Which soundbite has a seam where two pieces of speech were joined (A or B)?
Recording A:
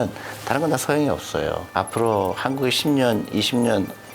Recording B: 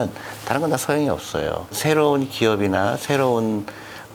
A